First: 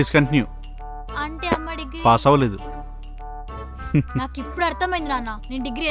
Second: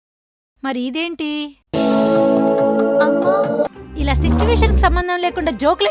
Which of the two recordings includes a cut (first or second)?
second